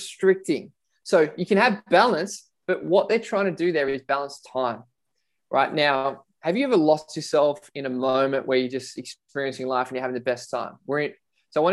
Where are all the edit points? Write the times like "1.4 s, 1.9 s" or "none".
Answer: none